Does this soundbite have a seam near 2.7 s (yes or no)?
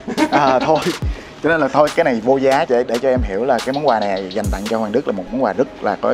yes